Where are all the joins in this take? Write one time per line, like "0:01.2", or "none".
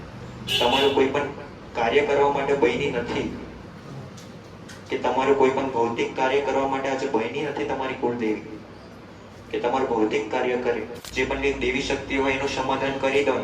0:11.0

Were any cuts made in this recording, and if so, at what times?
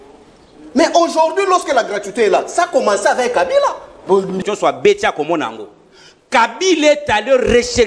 0:04.4

